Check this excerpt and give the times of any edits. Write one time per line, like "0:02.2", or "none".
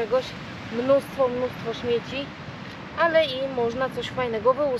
none